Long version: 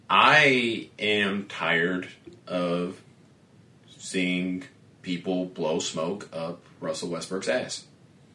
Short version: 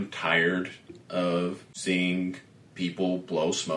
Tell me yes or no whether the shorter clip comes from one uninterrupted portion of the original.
no